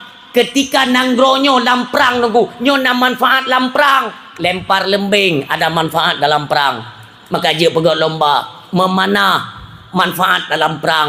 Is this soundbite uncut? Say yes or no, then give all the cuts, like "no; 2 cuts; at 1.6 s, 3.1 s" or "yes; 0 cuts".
yes; 0 cuts